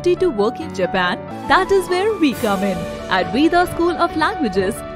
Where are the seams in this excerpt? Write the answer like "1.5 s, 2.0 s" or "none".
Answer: 1.3 s